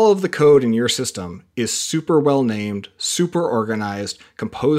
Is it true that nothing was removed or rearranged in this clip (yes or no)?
yes